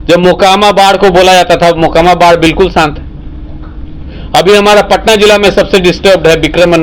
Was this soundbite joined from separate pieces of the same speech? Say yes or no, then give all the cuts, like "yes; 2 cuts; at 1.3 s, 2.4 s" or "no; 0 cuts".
no; 0 cuts